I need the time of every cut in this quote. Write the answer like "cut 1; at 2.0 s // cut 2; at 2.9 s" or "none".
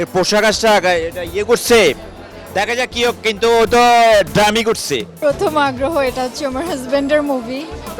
cut 1; at 5.1 s